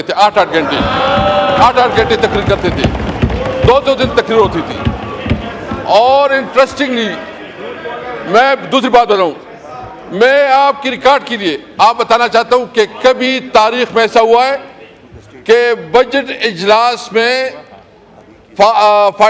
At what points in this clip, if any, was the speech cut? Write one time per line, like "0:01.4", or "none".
none